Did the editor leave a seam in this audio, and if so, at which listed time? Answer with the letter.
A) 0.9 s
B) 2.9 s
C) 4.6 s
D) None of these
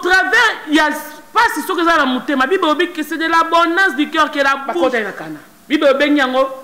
C